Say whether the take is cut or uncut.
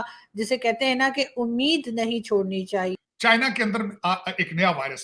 cut